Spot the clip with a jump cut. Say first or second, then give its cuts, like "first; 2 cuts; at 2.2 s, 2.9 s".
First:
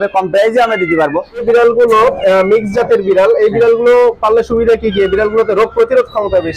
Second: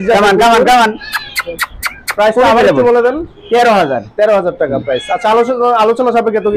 first; 1 cut; at 1.4 s